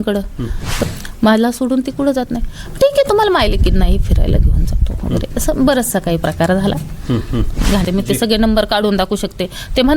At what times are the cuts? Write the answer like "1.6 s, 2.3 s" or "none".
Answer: 0.8 s, 7.8 s